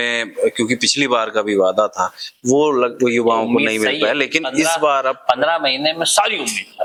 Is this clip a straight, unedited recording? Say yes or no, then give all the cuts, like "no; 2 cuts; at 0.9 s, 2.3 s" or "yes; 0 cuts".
yes; 0 cuts